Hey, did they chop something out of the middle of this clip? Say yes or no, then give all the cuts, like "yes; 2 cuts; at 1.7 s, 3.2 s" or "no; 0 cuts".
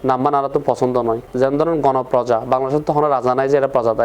yes; 1 cut; at 1.2 s